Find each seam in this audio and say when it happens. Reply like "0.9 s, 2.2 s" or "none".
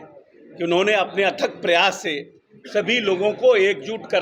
none